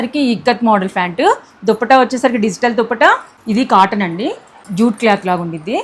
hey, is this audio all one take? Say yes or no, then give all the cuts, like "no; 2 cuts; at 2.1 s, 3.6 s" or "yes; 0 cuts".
no; 2 cuts; at 3.3 s, 4.6 s